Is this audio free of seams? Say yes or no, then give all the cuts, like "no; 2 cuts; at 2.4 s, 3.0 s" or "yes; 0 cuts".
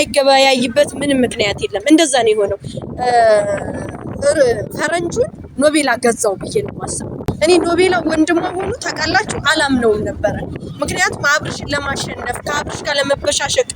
no; 1 cut; at 7.2 s